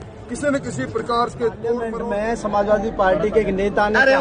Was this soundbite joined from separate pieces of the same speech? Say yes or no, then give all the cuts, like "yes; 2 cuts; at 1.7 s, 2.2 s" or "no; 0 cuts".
yes; 1 cut; at 2.0 s